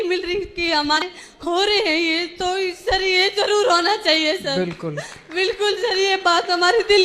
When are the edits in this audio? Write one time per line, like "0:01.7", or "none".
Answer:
0:01.0